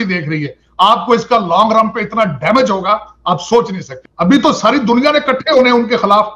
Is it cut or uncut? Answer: cut